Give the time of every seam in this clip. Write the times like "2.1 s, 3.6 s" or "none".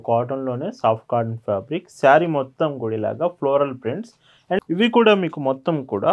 4.6 s